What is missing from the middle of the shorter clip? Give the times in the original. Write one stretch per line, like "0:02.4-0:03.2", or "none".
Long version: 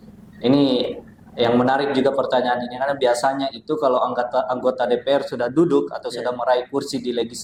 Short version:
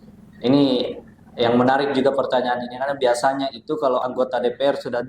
0:04.0-0:04.5